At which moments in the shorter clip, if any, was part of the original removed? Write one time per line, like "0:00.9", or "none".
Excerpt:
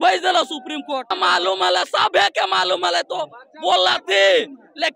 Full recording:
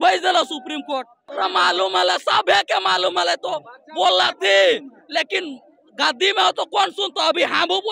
0:01.1